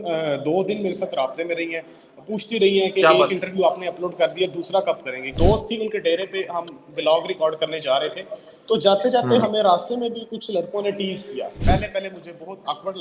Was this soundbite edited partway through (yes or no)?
yes